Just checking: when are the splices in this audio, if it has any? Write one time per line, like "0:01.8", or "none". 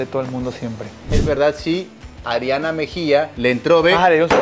0:01.1
0:03.3